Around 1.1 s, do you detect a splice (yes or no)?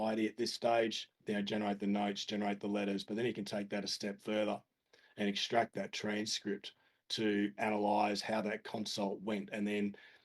yes